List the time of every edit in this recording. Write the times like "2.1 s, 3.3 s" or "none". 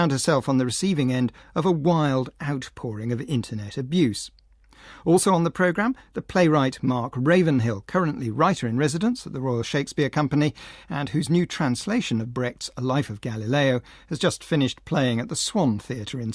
13.2 s